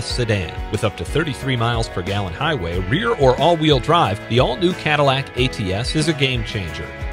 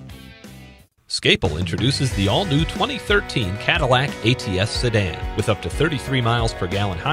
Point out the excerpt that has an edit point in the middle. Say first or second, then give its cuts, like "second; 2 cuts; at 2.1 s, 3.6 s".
second; 1 cut; at 1.1 s